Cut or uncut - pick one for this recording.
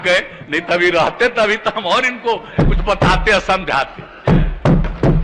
uncut